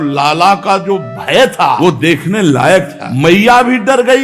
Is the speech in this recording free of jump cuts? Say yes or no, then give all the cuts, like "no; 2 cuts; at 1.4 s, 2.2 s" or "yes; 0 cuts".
no; 2 cuts; at 1.8 s, 3.0 s